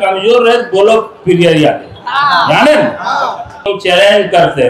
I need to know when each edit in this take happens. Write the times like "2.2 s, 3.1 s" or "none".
3.7 s